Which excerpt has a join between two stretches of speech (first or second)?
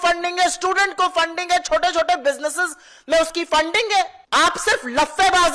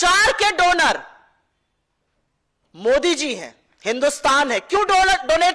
first